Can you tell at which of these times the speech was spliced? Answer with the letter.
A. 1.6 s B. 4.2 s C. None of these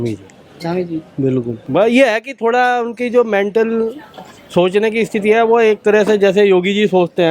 A